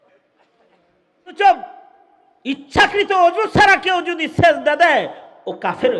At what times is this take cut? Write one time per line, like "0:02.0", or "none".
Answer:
0:01.4